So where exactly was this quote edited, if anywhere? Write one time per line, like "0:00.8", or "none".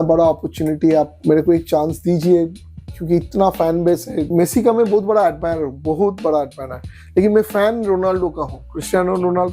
0:01.2
0:04.2

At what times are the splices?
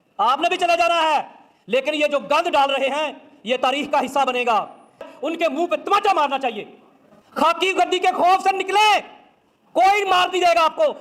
0:05.1
0:07.0

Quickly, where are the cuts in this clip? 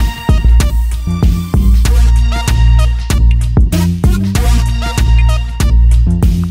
none

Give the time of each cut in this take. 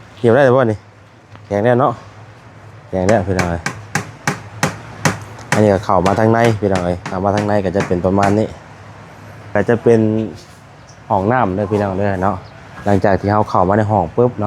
0:09.5

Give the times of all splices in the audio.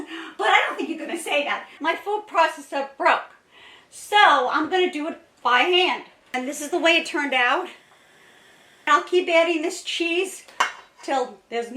0:01.8
0:06.3
0:08.9

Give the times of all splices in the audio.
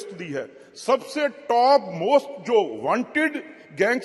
none

